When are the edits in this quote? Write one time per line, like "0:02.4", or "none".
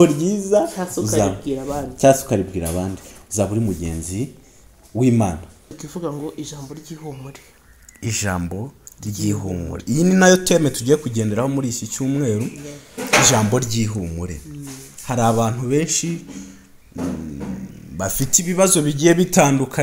0:05.7